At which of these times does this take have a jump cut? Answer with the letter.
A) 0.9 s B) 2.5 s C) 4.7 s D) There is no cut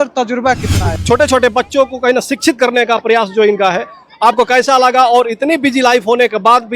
A